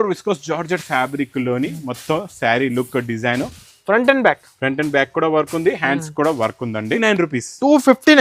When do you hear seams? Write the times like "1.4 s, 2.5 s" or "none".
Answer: 3.7 s, 6.9 s